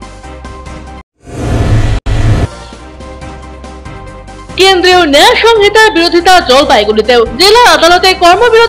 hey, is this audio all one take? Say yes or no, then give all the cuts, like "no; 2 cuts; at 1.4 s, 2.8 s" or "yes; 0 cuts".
yes; 0 cuts